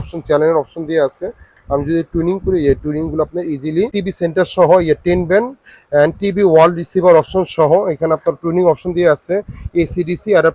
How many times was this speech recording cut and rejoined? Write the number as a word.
one